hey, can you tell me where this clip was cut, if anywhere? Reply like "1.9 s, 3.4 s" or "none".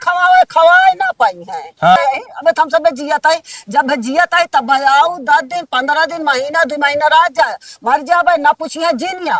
2.0 s